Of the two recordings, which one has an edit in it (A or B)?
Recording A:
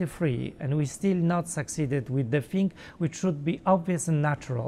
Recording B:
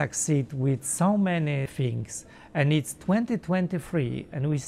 B